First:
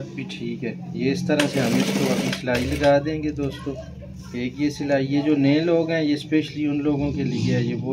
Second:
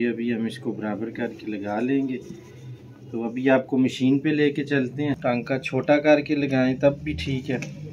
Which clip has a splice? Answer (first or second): second